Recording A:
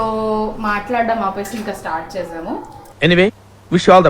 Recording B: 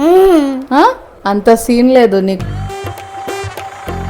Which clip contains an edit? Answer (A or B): B